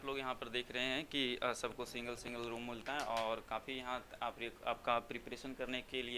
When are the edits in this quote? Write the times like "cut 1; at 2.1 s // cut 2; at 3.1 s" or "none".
none